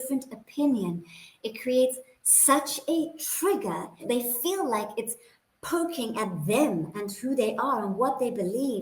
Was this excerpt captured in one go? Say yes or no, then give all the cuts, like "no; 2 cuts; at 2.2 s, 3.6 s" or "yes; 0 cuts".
yes; 0 cuts